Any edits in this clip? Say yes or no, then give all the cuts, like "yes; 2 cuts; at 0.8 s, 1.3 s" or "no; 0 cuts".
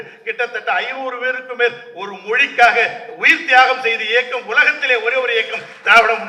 no; 0 cuts